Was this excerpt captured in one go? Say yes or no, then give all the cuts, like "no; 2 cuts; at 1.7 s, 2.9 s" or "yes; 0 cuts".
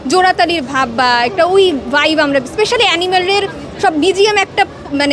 yes; 0 cuts